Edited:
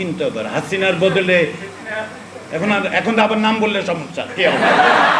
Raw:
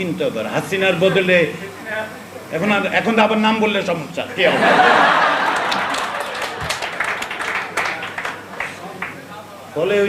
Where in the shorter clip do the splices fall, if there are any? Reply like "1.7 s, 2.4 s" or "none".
none

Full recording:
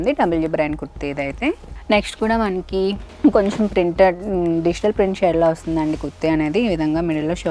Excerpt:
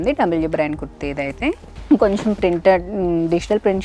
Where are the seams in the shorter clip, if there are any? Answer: 1.7 s

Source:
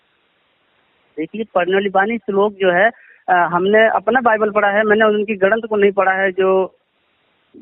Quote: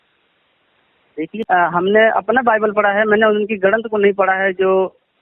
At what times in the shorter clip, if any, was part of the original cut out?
1.4 s

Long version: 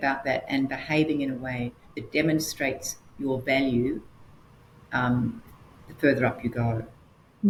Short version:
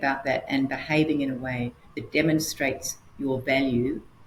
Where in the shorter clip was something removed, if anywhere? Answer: none

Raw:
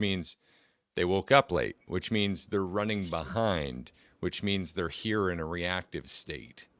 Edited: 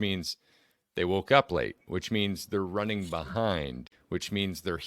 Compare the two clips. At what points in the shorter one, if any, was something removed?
3.9 s

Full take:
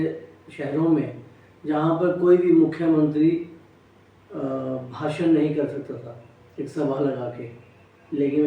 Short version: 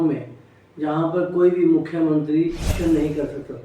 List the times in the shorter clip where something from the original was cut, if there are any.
2.7 s

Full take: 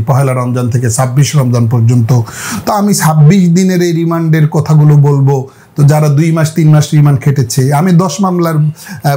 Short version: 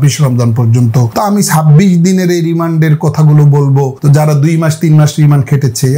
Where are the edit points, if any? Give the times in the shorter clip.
1.1 s, 3.9 s

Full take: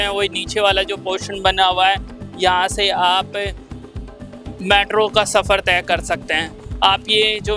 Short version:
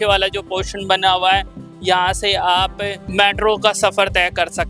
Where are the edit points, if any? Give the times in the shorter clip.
3.0 s

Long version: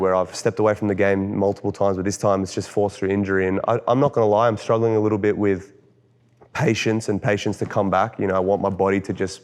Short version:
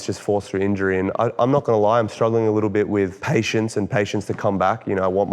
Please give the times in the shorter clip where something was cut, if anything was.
3.2 s

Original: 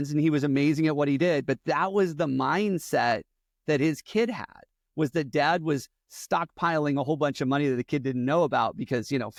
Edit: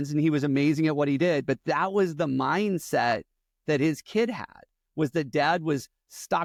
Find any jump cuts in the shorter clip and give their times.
none

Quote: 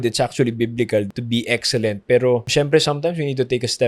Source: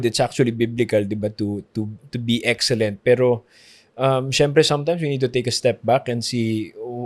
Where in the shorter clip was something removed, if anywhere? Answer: 1.1 s, 2.5 s

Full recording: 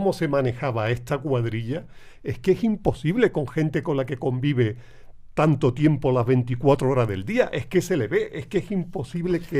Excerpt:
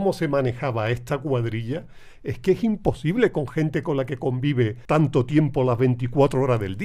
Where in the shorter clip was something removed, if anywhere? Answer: 4.8 s

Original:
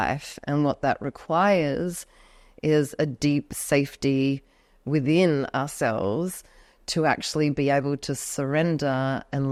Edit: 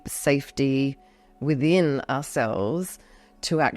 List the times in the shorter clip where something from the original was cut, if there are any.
none

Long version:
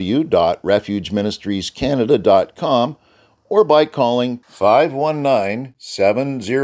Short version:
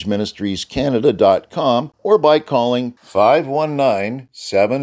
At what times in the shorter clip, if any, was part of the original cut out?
1.9 s

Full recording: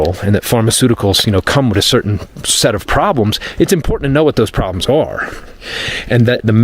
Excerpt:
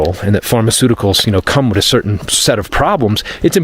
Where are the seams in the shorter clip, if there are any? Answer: 2.2 s

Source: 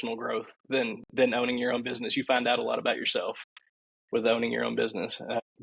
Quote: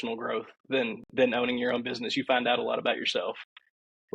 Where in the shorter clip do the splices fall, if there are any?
none

